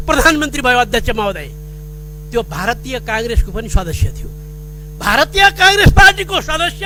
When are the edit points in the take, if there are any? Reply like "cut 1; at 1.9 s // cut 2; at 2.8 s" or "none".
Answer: none